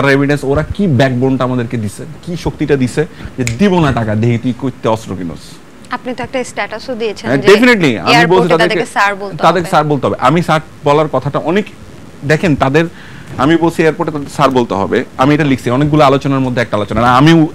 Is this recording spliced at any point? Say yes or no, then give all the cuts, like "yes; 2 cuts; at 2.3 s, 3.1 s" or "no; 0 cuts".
no; 0 cuts